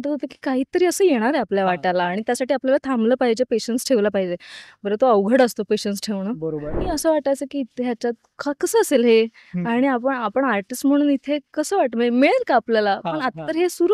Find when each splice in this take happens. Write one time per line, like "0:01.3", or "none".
0:06.8